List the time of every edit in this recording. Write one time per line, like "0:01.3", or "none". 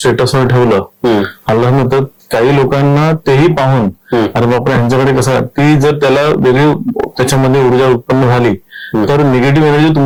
none